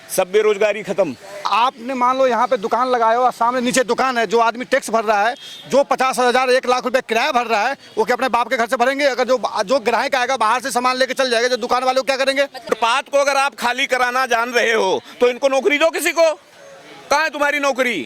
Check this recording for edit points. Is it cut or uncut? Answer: cut